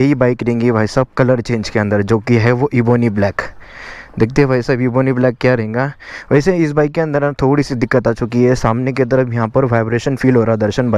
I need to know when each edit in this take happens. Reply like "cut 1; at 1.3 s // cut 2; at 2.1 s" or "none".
none